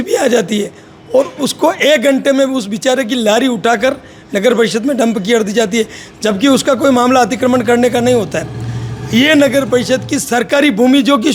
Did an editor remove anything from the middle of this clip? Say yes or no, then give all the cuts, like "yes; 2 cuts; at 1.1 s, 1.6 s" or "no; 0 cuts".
no; 0 cuts